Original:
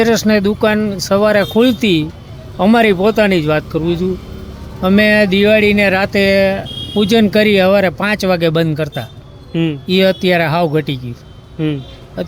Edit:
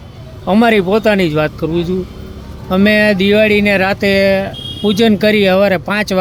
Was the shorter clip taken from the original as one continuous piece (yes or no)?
yes